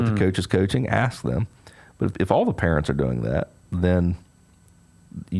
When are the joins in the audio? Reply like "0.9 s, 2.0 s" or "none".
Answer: 2.1 s

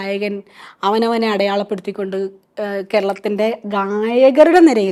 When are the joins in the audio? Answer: none

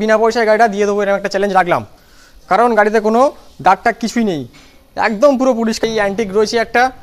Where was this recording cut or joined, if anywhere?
5.8 s

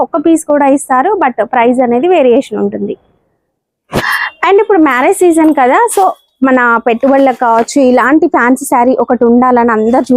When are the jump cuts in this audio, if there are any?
none

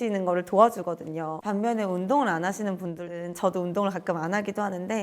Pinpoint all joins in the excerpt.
1.3 s

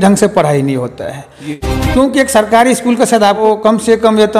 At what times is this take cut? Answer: 1.6 s, 3.4 s

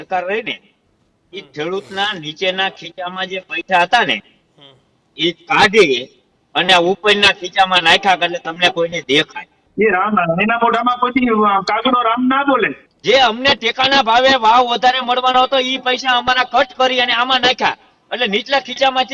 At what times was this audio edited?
9.6 s, 12.8 s

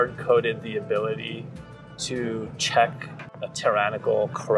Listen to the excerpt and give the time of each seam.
3.2 s

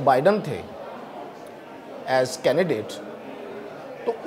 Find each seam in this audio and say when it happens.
none

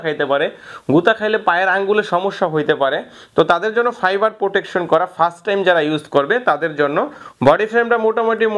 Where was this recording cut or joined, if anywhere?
none

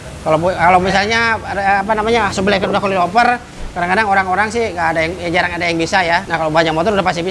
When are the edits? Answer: 6.3 s

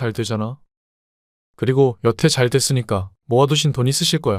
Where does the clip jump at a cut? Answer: 3.1 s

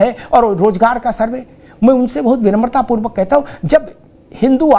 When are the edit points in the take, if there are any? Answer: none

